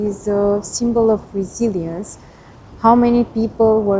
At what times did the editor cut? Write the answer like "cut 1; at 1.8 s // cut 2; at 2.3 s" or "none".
none